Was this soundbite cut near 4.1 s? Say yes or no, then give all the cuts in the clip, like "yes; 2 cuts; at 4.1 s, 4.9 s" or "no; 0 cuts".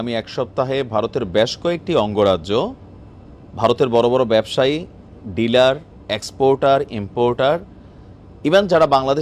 no; 0 cuts